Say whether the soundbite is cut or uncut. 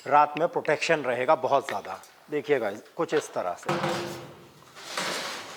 uncut